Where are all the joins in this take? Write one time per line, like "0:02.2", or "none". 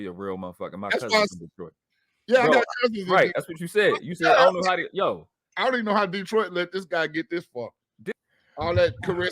0:08.1